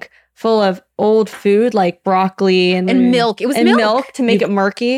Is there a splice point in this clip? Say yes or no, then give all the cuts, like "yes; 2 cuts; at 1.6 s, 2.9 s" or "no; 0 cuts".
yes; 1 cut; at 2.8 s